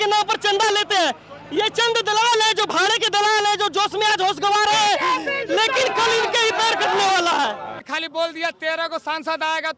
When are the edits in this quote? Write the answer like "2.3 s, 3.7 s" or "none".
7.9 s

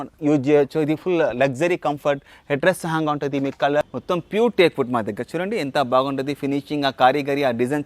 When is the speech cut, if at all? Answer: 3.8 s

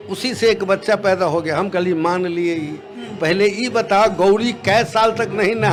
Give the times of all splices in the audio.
none

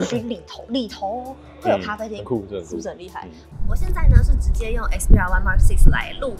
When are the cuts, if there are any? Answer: 3.5 s

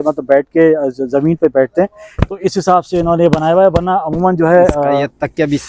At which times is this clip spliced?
none

